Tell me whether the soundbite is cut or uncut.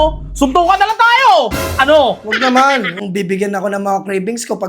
cut